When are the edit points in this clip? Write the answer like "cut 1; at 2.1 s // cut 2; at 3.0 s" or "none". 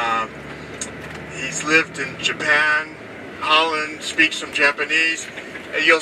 cut 1; at 2.6 s